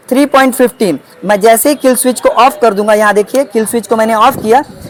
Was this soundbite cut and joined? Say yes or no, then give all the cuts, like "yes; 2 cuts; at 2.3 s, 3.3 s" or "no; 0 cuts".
no; 0 cuts